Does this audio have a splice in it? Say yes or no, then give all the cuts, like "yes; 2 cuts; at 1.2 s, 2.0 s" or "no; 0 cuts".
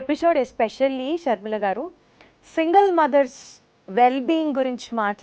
no; 0 cuts